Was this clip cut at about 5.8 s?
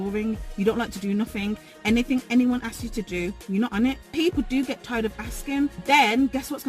yes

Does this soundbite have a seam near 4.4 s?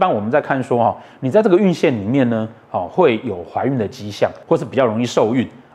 yes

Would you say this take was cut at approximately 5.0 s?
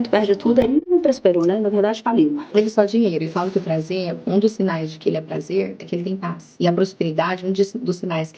no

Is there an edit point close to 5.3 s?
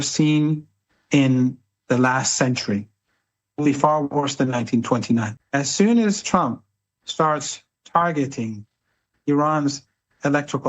yes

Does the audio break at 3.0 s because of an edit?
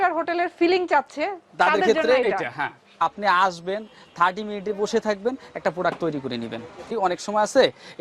yes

